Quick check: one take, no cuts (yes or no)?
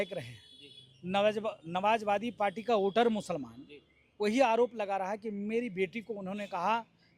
yes